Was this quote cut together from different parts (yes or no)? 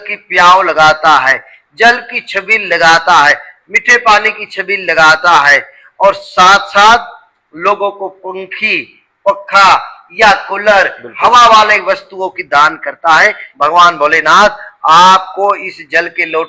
yes